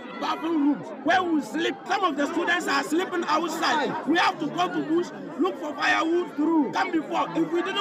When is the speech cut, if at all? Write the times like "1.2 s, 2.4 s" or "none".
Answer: 1.8 s